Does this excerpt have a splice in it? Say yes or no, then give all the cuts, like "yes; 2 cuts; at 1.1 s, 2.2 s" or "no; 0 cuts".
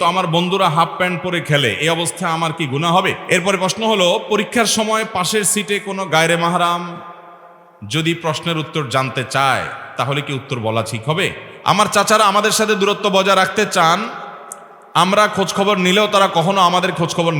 yes; 2 cuts; at 3.2 s, 11.5 s